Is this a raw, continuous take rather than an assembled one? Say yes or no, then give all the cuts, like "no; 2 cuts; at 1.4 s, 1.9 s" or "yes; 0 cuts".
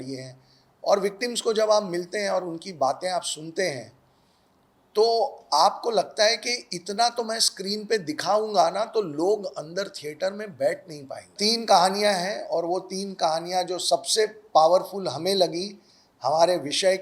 no; 1 cut; at 11.3 s